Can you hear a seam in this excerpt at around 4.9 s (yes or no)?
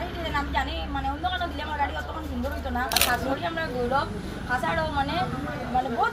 no